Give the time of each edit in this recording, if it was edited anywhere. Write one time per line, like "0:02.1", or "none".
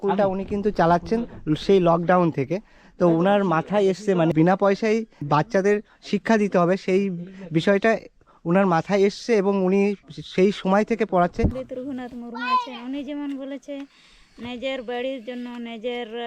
0:04.3
0:05.2
0:11.6